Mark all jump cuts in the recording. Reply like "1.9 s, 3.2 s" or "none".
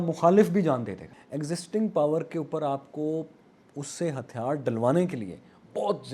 1.0 s